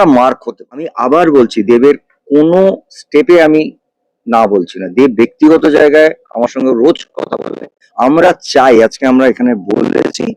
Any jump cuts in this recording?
yes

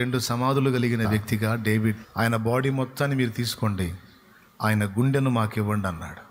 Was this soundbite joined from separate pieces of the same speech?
yes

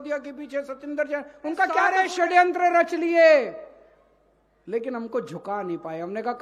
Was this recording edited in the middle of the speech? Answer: yes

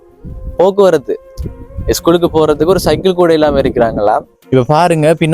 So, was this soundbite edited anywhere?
yes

